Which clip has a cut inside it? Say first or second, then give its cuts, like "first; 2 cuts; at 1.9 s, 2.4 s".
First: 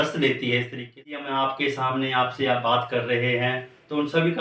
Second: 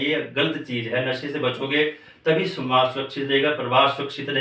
first; 1 cut; at 1.0 s